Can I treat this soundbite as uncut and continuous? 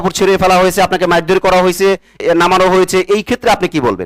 no; 1 cut; at 2.2 s

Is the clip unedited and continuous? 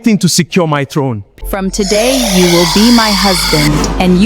no; 1 cut; at 1.2 s

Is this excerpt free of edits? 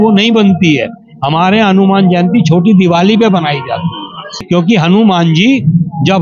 no; 1 cut; at 4.4 s

